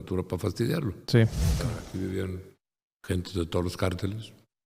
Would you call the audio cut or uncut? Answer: cut